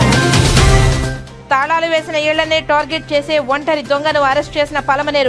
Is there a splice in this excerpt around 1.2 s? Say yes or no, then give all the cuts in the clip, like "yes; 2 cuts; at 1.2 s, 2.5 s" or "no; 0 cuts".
yes; 1 cut; at 1.2 s